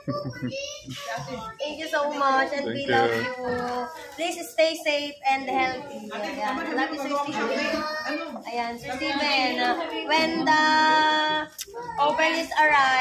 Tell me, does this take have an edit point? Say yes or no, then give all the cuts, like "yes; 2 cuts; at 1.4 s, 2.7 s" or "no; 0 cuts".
no; 0 cuts